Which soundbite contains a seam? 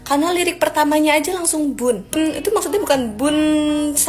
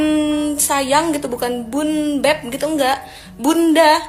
first; 1 cut; at 2.1 s

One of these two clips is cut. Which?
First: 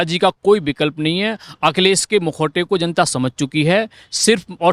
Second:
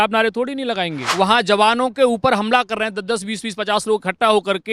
second; 1 cut; at 1.0 s

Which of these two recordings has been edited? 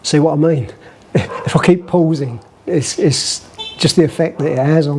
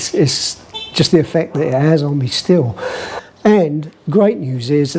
second; 1 cut; at 3.2 s

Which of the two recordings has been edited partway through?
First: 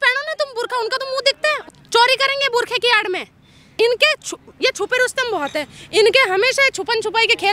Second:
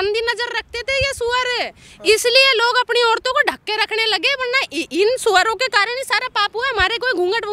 first; 2 cuts; at 1.6 s, 3.7 s

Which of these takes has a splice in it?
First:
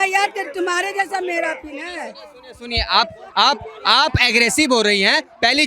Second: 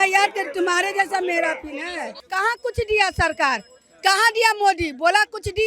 second; 1 cut; at 2.2 s

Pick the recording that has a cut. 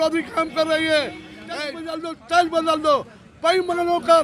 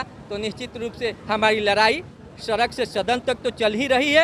first; 1 cut; at 1.7 s

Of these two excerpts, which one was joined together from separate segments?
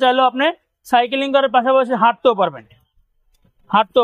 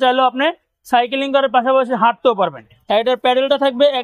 second; 1 cut; at 2.7 s

